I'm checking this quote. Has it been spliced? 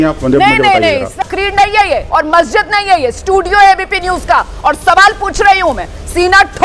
yes; 1 cut; at 1.2 s

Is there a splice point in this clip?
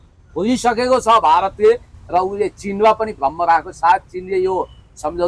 no; 0 cuts

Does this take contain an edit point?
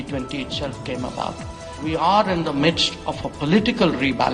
yes; 1 cut; at 1.8 s

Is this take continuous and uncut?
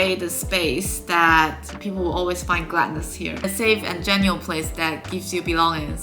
no; 1 cut; at 1.7 s

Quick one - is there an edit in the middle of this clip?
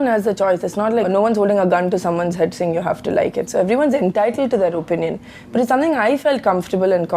yes; 1 cut; at 1.1 s

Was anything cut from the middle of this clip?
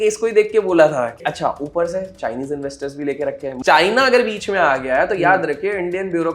yes; 2 cuts; at 1.2 s, 3.5 s

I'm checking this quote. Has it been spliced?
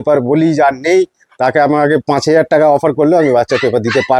no; 0 cuts

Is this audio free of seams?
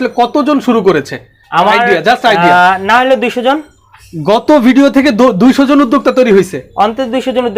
yes; 0 cuts

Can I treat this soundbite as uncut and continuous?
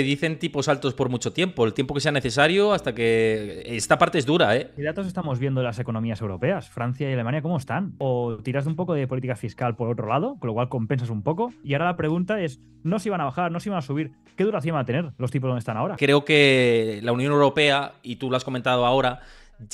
no; 4 cuts; at 4.8 s, 8.0 s, 11.6 s, 16.0 s

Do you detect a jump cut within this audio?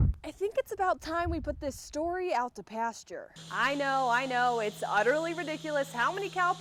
no; 0 cuts

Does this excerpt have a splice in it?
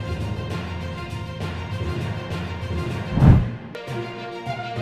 yes; 1 cut; at 3.6 s

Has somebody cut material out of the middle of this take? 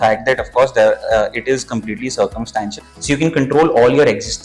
yes; 1 cut; at 2.7 s

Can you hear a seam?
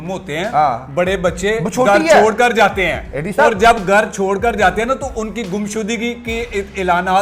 no; 0 cuts

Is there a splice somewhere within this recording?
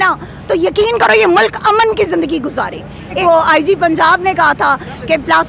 yes; 1 cut; at 3.2 s

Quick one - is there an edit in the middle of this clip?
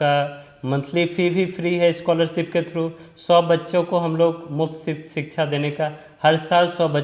no; 0 cuts

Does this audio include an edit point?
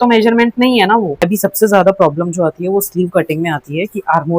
yes; 1 cut; at 1.2 s

